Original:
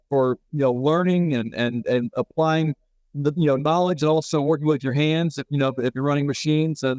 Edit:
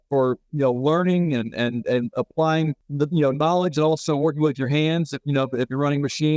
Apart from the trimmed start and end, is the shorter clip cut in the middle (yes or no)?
yes